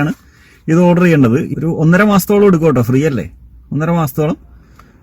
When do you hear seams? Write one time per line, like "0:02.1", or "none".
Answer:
0:01.5